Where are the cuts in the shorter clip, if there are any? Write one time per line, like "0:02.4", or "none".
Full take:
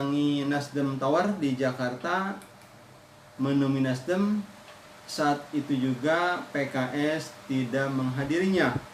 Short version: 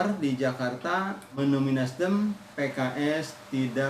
0:01.4
0:02.5